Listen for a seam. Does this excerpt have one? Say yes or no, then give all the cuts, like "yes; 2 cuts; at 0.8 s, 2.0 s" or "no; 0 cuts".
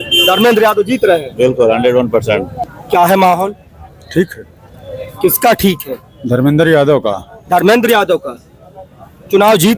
yes; 1 cut; at 2.5 s